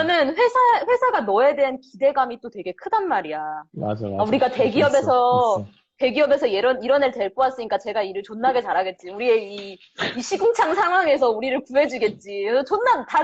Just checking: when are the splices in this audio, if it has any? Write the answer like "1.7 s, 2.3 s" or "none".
none